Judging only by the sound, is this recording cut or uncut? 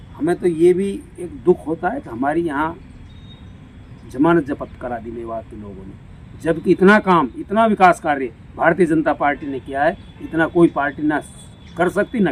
uncut